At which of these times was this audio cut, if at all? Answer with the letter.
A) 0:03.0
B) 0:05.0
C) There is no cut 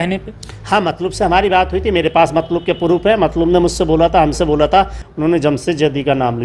B